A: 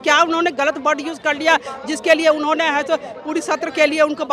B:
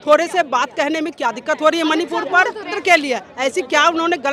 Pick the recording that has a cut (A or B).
B